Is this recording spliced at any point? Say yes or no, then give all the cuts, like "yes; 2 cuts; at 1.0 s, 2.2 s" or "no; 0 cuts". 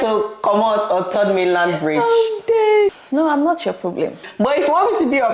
yes; 2 cuts; at 3.0 s, 4.3 s